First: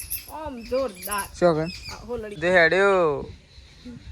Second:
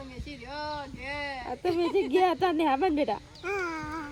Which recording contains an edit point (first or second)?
first